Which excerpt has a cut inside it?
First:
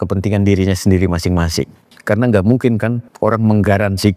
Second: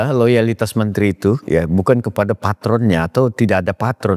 first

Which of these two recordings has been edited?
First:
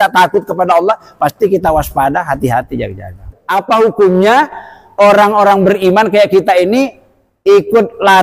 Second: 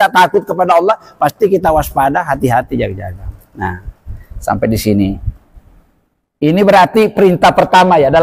first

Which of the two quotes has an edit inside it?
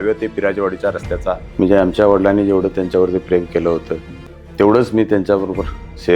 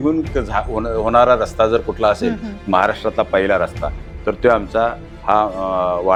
first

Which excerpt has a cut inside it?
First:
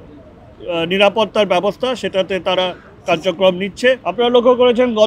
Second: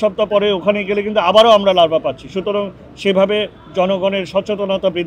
first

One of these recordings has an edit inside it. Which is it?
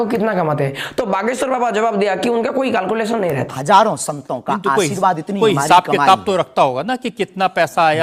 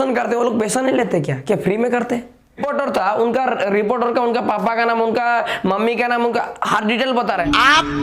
second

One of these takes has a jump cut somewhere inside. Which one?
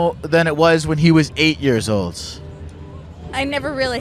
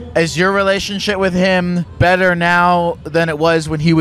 second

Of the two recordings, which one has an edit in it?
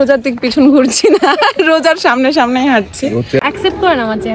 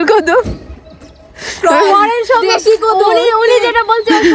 first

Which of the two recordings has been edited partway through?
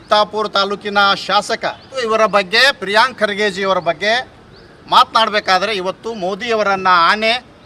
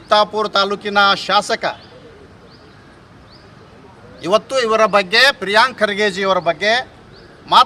first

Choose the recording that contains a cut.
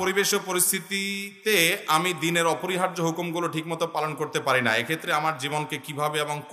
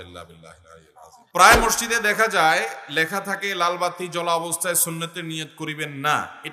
second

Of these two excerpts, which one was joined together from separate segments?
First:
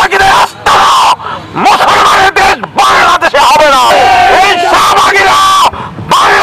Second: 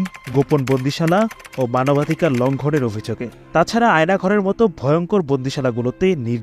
first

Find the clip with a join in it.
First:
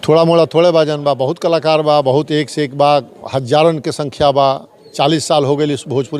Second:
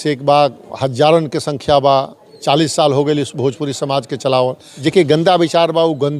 second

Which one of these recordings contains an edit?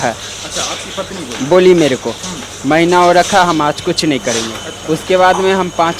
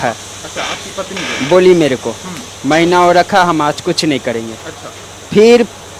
first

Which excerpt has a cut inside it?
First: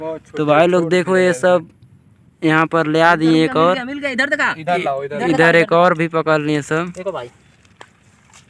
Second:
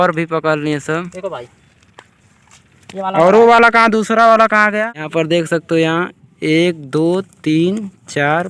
second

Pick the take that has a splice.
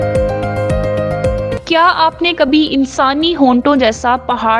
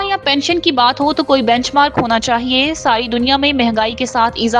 first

